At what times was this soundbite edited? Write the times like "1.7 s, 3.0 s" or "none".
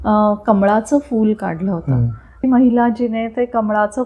2.4 s